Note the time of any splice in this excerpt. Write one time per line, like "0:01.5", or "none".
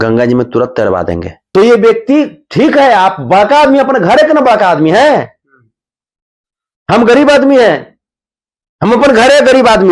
0:01.3